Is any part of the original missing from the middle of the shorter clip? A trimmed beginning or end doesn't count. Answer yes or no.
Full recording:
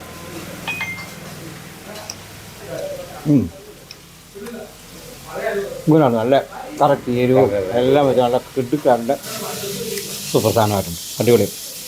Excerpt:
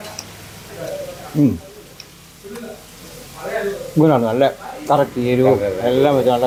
no